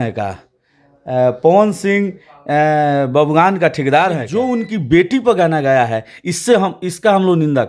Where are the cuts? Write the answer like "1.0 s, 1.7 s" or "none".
4.3 s

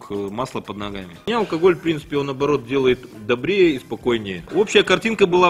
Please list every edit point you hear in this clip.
1.3 s, 4.4 s

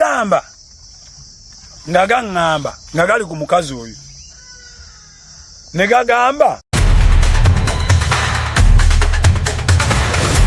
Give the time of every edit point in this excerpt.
6.6 s

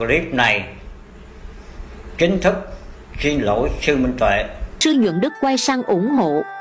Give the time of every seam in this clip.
4.6 s

